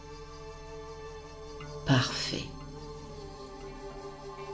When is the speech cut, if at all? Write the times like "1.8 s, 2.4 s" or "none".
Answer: none

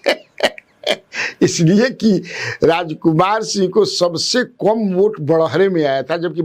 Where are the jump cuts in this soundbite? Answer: none

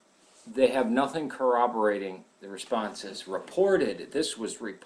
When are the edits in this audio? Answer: 1.2 s

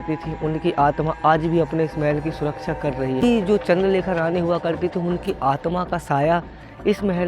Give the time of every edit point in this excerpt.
3.2 s

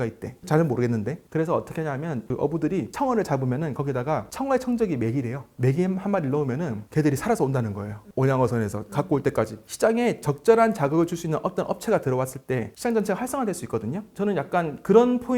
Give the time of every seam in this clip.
9.6 s

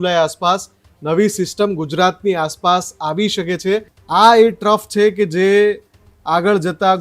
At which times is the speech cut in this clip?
4.0 s

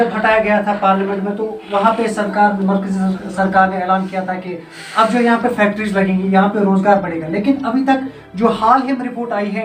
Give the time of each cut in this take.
none

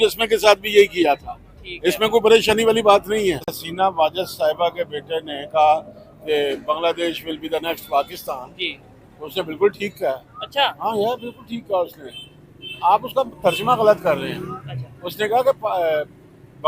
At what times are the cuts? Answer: 3.6 s

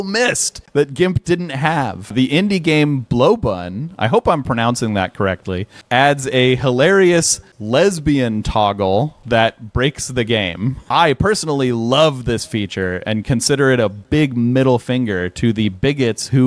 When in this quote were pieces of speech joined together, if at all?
2.1 s, 10.8 s

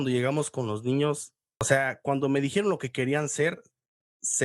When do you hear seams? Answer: 1.7 s

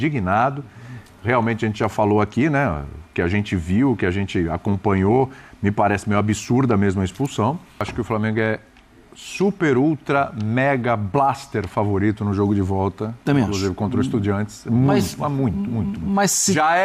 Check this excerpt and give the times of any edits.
7.9 s

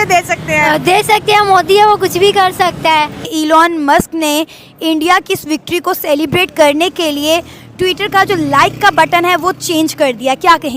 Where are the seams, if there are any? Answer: 3.2 s

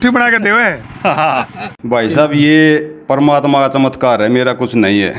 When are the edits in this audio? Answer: 1.6 s

